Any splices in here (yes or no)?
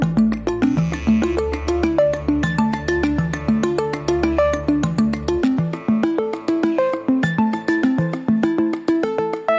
yes